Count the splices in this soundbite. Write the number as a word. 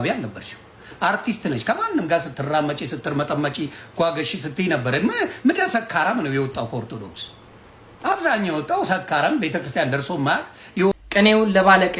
one